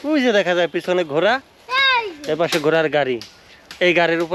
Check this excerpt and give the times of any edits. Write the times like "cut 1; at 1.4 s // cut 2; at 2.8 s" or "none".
none